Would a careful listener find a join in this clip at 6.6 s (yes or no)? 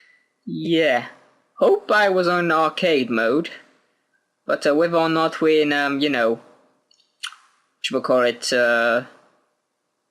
no